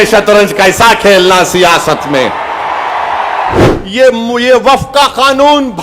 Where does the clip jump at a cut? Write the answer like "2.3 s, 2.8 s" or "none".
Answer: 3.6 s

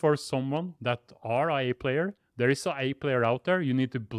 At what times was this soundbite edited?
none

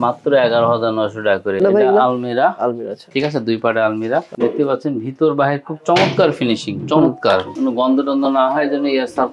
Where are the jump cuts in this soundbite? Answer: 1.6 s, 7.5 s

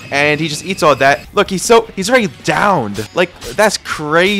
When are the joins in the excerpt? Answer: 1.2 s, 3.0 s

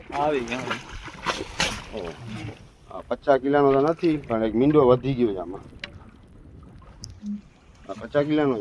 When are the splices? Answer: none

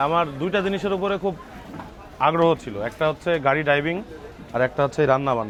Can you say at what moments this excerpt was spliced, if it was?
none

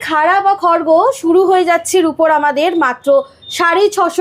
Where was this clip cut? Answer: none

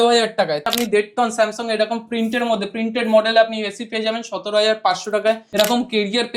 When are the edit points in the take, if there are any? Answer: 0.7 s, 5.5 s

